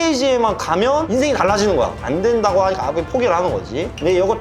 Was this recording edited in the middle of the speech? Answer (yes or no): no